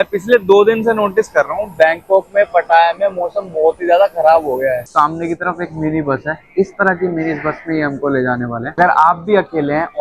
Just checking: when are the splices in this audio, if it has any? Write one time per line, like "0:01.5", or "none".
0:04.8
0:08.7